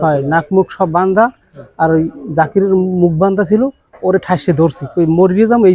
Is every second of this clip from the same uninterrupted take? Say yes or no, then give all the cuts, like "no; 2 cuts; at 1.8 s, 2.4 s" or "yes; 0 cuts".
yes; 0 cuts